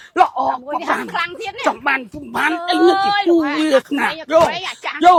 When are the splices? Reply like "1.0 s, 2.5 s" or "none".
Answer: none